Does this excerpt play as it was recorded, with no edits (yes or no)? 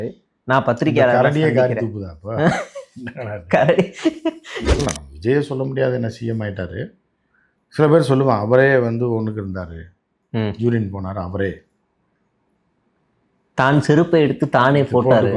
no